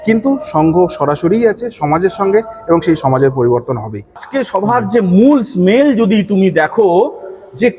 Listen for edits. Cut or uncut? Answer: cut